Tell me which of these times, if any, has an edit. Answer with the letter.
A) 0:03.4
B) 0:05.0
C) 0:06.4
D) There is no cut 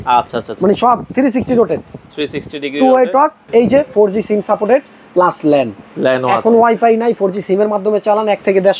A